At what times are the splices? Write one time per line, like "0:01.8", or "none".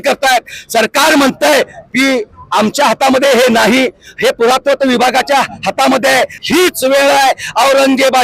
0:06.4

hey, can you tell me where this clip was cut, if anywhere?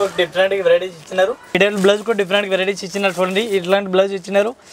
0:01.6

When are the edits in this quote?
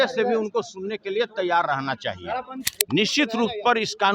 0:02.6

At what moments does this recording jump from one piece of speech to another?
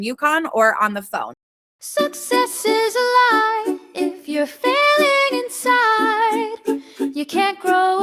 0:01.4

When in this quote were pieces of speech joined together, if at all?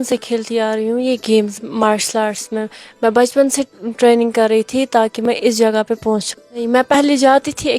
0:06.3

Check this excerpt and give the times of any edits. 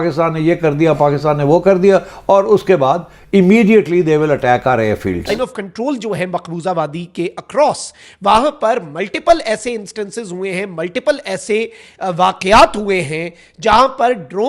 0:05.3

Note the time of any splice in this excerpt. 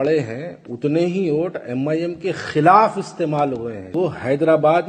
0:03.9

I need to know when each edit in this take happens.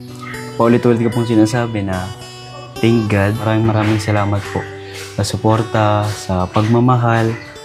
0:03.4

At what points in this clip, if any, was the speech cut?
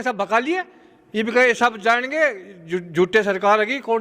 none

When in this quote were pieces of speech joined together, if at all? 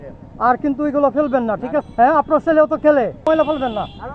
0:01.8
0:03.2

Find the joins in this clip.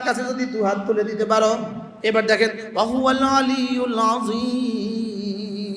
0:01.8

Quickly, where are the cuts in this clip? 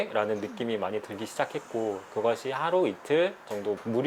none

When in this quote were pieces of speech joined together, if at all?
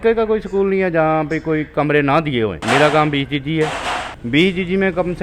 0:02.6
0:04.1

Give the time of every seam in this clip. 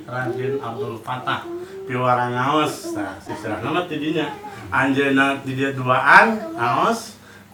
none

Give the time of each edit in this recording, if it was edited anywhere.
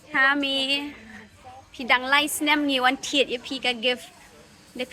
none

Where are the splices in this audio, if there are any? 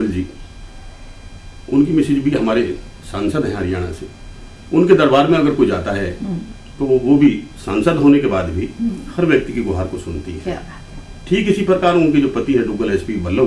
none

